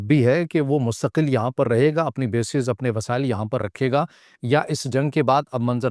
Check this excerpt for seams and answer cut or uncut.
uncut